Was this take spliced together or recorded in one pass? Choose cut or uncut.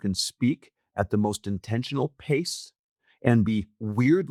uncut